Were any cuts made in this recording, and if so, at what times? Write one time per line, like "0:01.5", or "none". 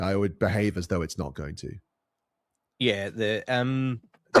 none

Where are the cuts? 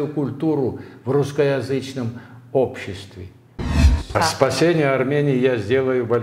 0:03.7

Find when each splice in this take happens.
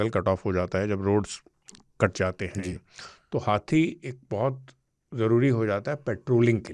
none

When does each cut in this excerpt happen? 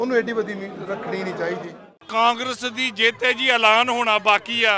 0:02.0

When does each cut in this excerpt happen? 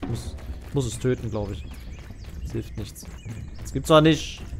0:03.6

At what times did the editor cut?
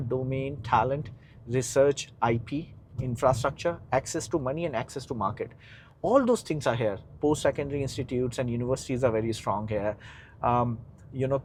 none

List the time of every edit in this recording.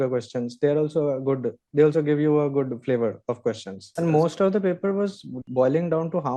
0:03.9
0:05.4

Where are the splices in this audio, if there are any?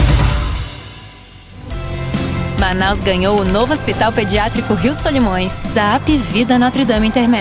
0:01.7

